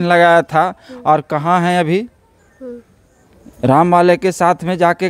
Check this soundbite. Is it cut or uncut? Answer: uncut